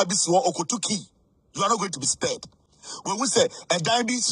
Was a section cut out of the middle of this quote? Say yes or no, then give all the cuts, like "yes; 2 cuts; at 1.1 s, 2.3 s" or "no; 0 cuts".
no; 0 cuts